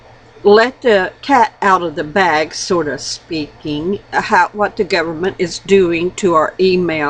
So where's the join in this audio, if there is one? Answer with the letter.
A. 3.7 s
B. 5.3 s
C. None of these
B